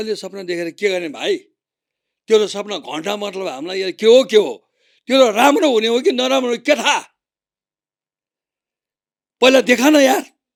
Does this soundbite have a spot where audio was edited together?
no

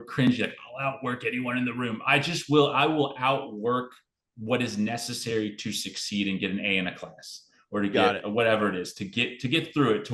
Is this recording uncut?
yes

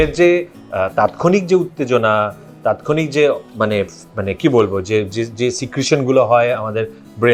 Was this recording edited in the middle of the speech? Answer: no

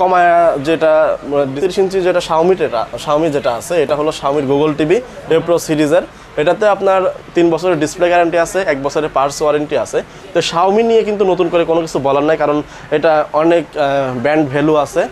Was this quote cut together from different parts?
yes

